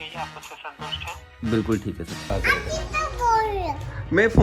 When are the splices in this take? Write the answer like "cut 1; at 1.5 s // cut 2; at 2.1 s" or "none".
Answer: cut 1; at 2.2 s

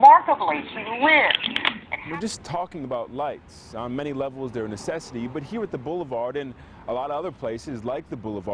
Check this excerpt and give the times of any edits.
cut 1; at 1.6 s

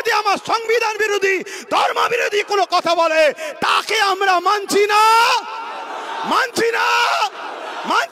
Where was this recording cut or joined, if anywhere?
none

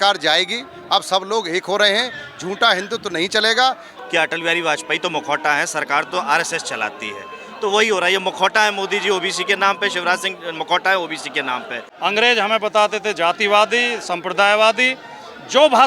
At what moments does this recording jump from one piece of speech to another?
cut 1; at 3.9 s // cut 2; at 11.8 s

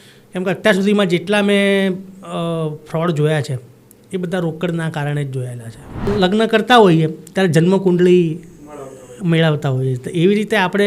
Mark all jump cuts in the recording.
cut 1; at 6.0 s

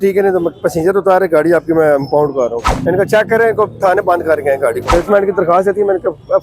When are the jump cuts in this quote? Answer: cut 1; at 2.6 s // cut 2; at 4.9 s

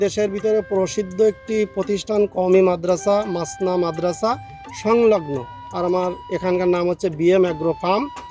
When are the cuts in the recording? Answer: none

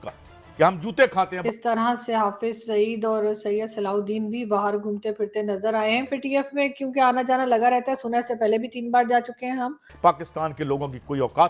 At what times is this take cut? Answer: cut 1; at 1.4 s // cut 2; at 6.1 s // cut 3; at 9.9 s

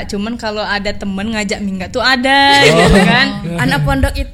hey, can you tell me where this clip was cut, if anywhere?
cut 1; at 3.4 s

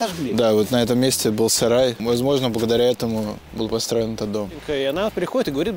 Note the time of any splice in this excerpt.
cut 1; at 2.0 s // cut 2; at 3.4 s // cut 3; at 4.6 s

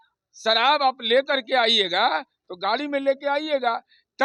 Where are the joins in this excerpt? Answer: none

